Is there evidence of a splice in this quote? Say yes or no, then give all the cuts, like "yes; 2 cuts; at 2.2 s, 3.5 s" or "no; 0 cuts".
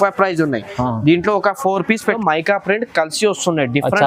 yes; 1 cut; at 2.2 s